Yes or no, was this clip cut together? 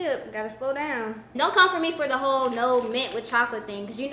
yes